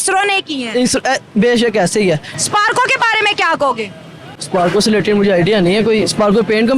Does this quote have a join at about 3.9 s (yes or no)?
no